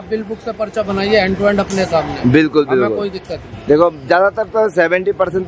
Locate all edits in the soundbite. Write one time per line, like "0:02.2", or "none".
none